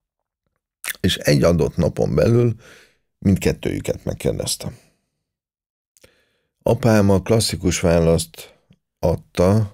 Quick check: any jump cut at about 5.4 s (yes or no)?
no